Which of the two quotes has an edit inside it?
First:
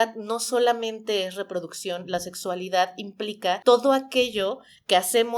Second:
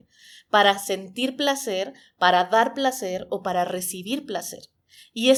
first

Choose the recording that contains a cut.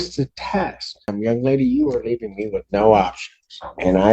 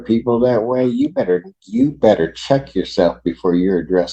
first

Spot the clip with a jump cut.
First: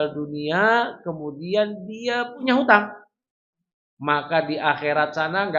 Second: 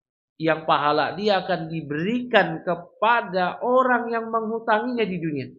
first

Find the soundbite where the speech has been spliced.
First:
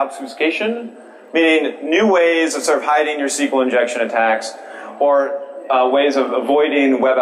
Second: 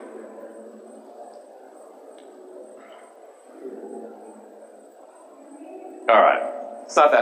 second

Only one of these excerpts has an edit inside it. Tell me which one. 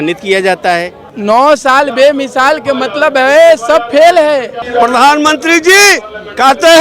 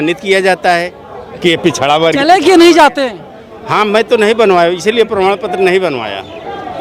first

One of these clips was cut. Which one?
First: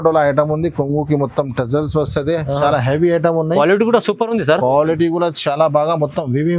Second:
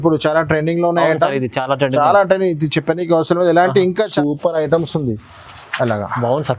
second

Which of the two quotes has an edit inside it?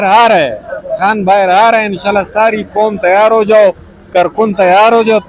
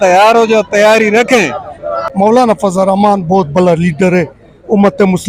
second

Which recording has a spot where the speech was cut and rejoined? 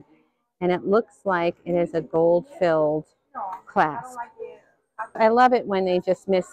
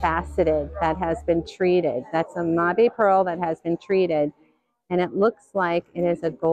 first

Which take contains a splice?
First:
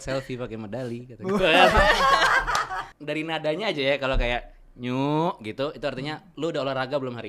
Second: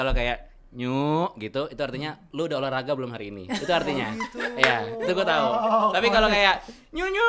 first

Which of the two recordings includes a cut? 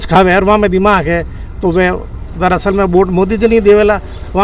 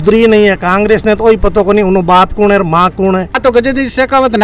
second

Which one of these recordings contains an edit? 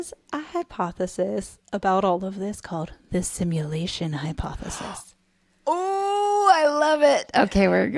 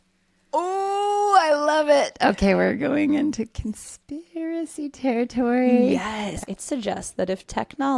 second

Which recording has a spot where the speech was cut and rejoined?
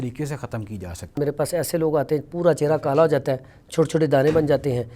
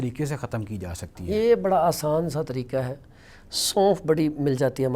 first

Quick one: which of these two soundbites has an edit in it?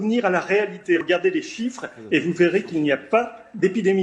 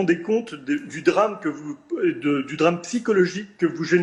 first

